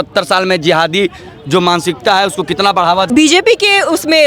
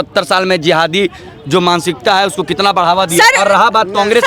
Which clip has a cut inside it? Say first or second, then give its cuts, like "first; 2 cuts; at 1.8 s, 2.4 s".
first; 1 cut; at 3.1 s